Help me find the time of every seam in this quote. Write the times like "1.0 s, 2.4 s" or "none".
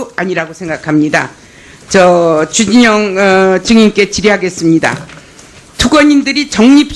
1.1 s